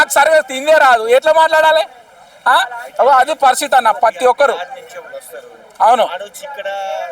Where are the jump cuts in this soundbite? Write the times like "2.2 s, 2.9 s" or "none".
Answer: none